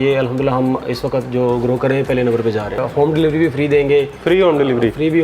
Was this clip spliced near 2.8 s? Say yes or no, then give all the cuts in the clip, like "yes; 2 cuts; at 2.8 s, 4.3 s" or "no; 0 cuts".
yes; 1 cut; at 2.8 s